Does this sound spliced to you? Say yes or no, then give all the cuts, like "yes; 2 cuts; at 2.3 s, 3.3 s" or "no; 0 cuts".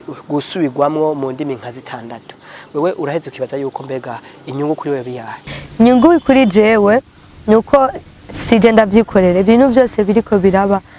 no; 0 cuts